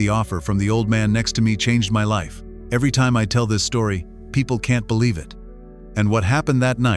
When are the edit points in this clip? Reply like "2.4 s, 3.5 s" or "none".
none